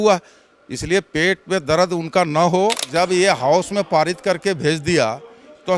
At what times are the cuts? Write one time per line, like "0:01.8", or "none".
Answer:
0:02.8